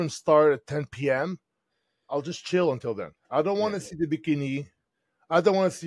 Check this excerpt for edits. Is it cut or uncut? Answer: cut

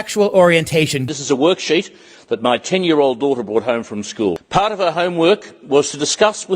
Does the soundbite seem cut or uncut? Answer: cut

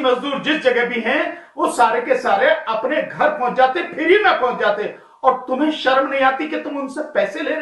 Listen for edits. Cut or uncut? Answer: uncut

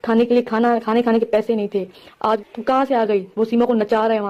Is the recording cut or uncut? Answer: cut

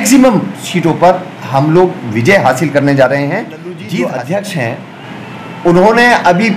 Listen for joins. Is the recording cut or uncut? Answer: cut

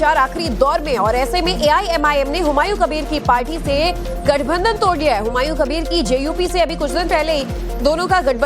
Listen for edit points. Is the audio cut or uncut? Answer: uncut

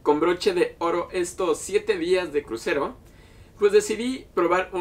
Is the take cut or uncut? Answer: uncut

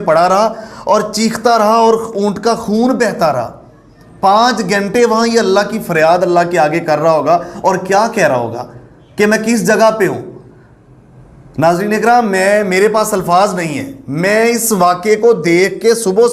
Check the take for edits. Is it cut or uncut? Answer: uncut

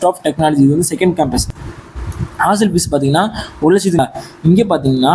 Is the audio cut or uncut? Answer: cut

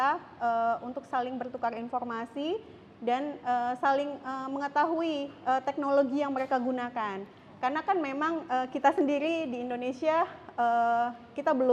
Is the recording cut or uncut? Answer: uncut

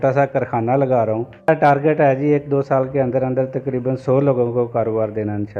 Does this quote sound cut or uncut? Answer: cut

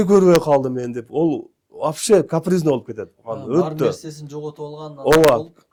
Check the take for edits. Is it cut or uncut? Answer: uncut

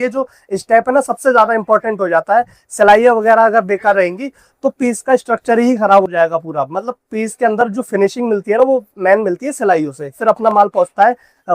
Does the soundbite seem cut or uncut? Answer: cut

